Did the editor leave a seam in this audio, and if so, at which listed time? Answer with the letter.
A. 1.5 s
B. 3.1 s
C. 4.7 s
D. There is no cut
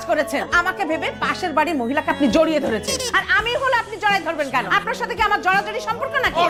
D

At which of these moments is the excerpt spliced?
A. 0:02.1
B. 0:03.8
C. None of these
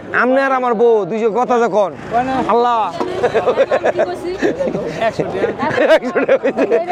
C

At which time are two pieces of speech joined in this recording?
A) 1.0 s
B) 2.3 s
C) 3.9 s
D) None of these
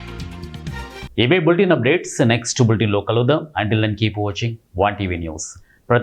D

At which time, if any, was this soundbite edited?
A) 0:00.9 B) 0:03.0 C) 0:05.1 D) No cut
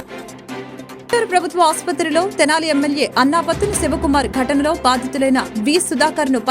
A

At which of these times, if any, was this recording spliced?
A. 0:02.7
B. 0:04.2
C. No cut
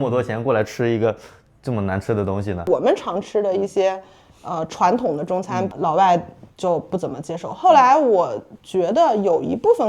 A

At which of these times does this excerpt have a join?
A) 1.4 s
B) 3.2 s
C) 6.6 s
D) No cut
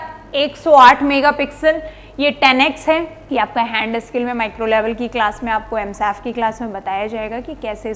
B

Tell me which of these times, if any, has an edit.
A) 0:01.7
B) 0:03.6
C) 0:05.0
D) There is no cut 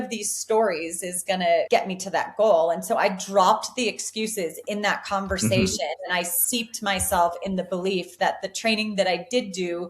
A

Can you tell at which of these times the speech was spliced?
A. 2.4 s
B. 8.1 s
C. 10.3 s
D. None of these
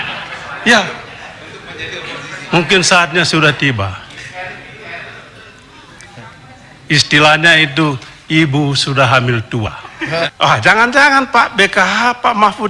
C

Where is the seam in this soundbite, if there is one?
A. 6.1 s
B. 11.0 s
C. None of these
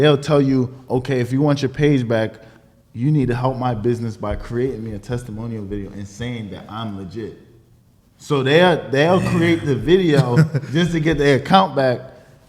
C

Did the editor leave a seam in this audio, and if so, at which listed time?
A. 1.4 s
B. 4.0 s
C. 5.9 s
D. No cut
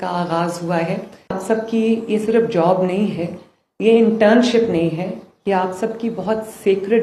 A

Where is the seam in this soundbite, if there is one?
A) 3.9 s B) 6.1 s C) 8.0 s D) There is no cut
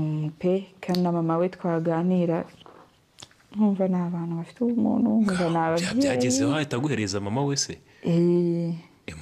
D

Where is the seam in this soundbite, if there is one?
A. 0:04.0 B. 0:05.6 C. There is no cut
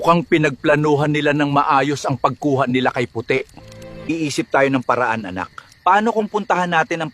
A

